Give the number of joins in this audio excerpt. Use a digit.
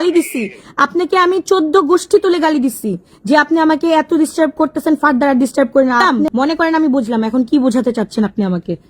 0